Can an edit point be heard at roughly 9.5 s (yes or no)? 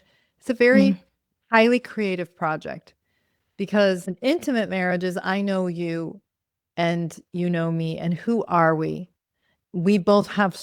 yes